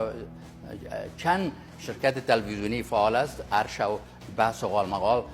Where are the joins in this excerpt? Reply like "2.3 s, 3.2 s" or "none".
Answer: none